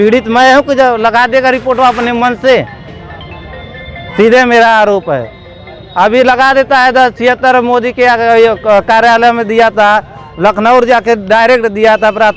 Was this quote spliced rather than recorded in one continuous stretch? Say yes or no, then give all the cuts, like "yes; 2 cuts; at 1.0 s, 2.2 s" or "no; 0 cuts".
no; 0 cuts